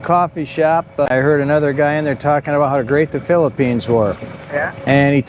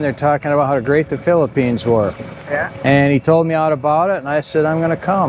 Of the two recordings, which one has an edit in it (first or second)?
first